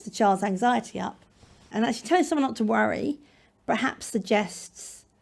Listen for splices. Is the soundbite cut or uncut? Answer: cut